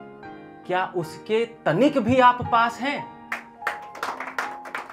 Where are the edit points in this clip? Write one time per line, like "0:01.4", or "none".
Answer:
none